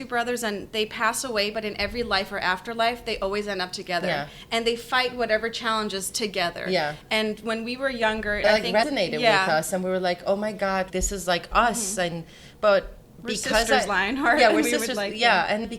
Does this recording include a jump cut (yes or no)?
no